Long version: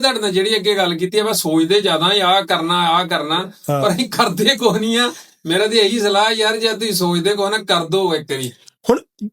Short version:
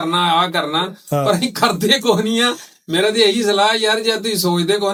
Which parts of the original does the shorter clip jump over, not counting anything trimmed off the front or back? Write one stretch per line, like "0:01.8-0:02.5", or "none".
none